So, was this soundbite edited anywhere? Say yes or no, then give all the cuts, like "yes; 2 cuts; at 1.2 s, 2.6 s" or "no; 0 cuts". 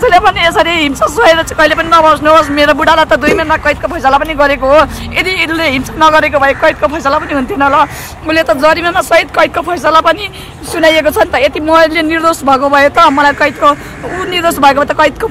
no; 0 cuts